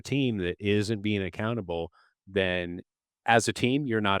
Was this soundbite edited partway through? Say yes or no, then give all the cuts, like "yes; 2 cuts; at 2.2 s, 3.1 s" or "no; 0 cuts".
yes; 1 cut; at 3.2 s